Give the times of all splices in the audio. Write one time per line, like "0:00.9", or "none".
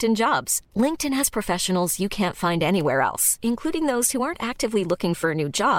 none